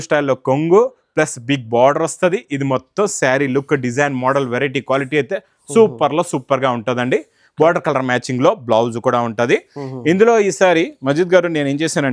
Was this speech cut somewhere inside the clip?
no; 0 cuts

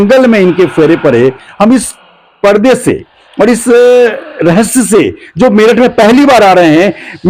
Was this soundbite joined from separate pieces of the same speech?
no; 0 cuts

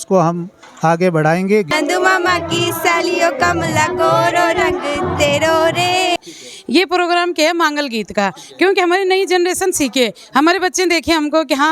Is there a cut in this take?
yes; 2 cuts; at 1.7 s, 6.2 s

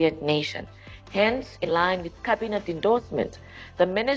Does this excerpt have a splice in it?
yes; 1 cut; at 1.6 s

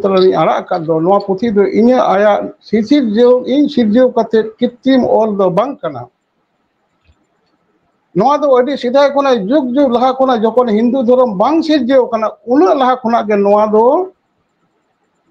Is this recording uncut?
yes; 0 cuts

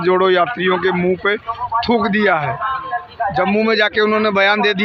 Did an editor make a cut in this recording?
no; 0 cuts

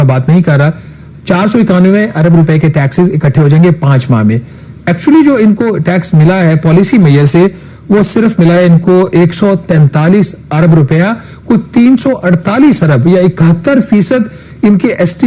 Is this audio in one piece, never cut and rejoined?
yes; 0 cuts

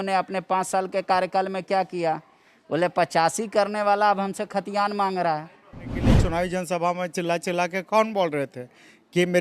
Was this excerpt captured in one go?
no; 1 cut; at 6.0 s

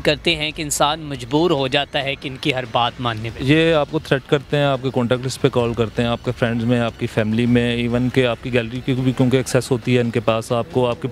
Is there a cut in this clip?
no; 0 cuts

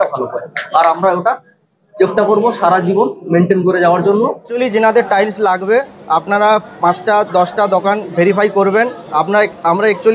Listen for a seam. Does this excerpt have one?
yes; 1 cut; at 4.4 s

